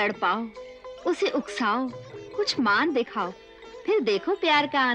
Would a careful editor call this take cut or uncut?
uncut